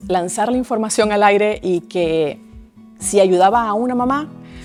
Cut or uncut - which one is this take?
uncut